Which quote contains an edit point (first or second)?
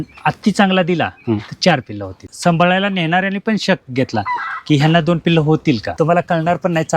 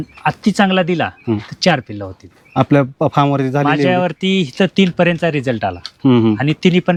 first